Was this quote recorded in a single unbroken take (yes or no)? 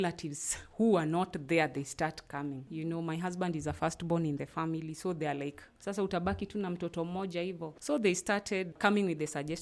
no